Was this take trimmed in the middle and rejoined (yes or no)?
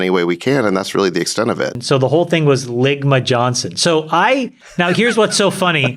yes